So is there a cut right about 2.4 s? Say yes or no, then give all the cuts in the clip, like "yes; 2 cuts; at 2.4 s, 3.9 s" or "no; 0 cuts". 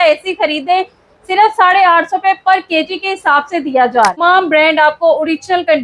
no; 1 cut; at 4.1 s